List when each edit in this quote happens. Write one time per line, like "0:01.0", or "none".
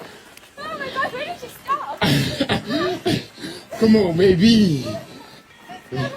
0:03.3